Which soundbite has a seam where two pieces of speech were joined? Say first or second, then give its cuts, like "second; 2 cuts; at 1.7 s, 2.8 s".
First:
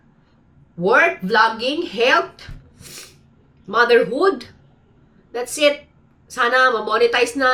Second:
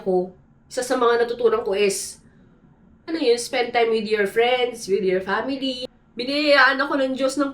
second; 1 cut; at 5.8 s